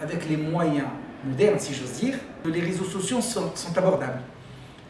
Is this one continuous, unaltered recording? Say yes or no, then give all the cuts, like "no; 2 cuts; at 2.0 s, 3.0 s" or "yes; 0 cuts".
no; 1 cut; at 2.4 s